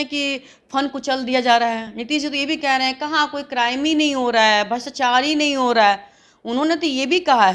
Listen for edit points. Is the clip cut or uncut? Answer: uncut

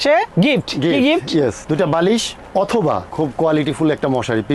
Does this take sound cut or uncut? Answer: uncut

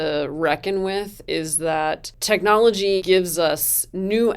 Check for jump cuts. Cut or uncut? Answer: cut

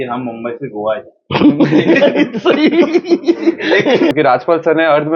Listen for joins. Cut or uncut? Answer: cut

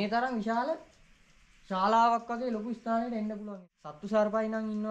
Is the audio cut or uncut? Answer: cut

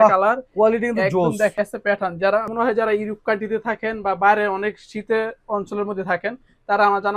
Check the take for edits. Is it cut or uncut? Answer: uncut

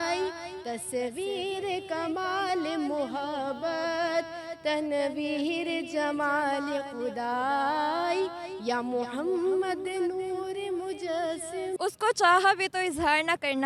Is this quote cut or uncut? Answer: cut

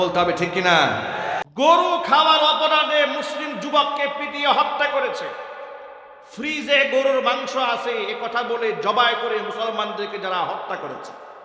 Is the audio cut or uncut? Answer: cut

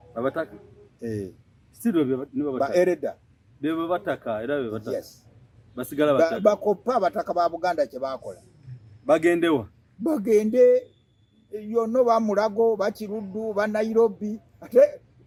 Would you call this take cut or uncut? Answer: uncut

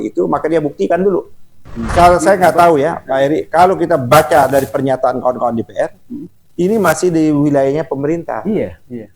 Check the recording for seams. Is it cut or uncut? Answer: cut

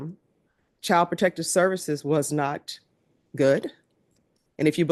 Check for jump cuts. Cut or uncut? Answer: uncut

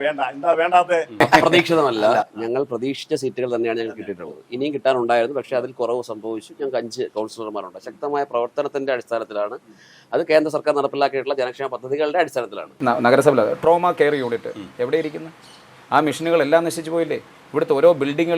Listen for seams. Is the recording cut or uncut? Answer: cut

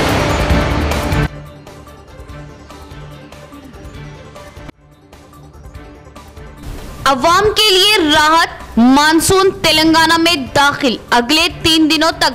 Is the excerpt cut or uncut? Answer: cut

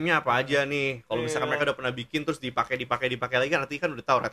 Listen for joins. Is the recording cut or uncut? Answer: uncut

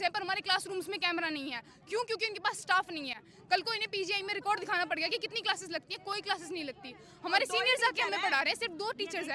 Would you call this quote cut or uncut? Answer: uncut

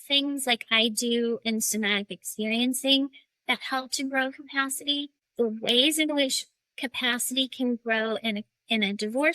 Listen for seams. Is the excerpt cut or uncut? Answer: cut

